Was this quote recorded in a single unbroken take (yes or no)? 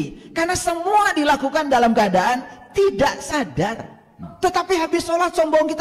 no